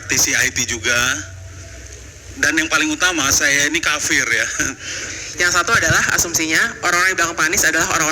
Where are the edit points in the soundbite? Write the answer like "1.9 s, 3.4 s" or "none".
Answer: 5.0 s